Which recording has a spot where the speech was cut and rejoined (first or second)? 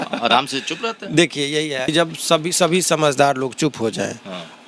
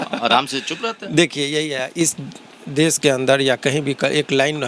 first